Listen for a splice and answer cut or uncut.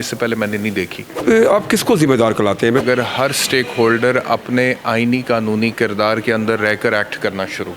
cut